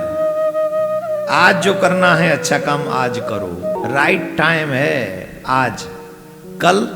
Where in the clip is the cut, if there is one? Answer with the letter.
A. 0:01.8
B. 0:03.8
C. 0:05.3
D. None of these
B